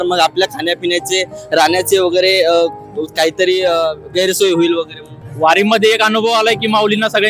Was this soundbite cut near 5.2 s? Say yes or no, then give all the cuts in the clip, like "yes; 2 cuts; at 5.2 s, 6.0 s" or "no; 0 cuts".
yes; 1 cut; at 5.2 s